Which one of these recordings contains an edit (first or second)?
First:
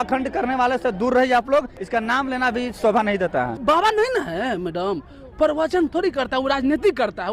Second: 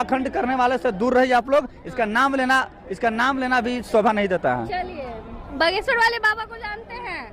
first